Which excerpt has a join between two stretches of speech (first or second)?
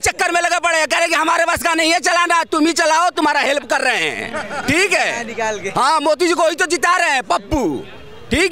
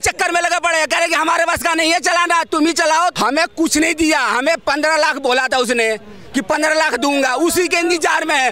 second